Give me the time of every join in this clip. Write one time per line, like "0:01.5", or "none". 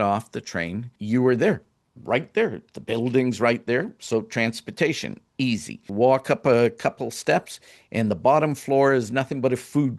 0:01.0
0:05.8